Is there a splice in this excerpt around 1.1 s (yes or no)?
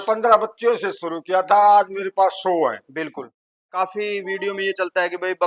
no